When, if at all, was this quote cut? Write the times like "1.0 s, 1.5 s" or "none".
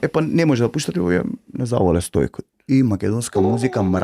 none